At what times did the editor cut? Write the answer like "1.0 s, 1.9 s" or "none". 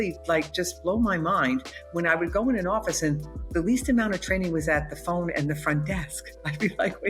none